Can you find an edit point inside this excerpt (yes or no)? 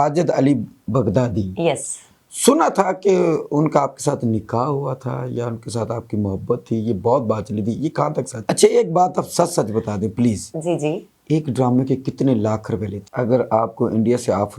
yes